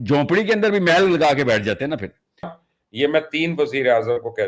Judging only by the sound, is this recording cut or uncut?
cut